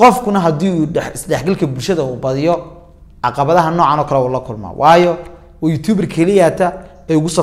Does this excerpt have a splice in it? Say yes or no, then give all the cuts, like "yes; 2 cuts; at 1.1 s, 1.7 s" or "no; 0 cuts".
no; 0 cuts